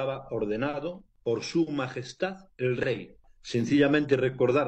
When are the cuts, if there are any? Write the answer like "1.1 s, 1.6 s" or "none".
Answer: 1.1 s, 3.3 s